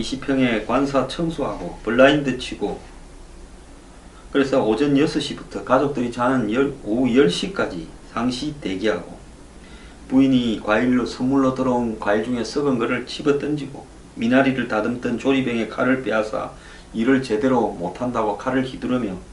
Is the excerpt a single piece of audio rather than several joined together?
no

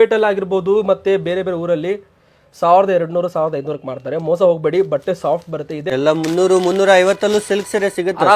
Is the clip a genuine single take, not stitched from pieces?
no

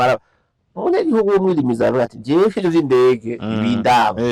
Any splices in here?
no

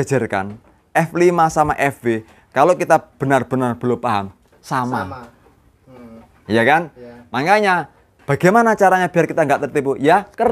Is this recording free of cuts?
yes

